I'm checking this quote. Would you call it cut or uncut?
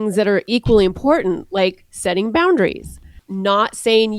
uncut